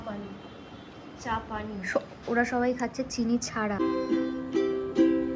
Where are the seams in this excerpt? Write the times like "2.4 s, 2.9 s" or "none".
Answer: 3.8 s